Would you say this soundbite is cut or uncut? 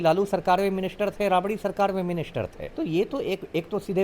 cut